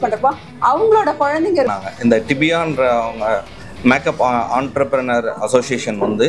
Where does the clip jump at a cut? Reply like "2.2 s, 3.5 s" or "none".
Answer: 1.8 s